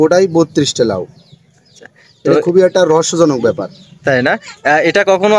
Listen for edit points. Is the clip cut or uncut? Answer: uncut